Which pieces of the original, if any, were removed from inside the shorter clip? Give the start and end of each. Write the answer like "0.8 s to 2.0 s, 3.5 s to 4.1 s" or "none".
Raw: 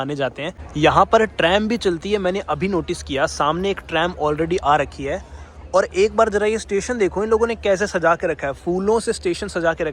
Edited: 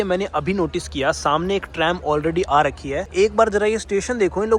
5.2 s to 5.9 s